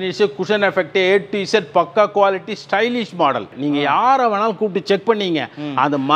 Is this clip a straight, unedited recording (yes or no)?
no